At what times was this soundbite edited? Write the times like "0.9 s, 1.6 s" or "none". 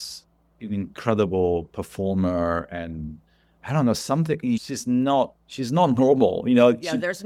none